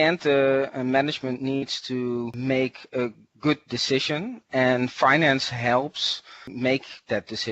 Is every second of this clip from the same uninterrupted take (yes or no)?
no